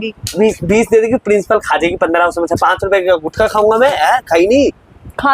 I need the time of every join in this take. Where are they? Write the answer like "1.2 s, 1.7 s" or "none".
none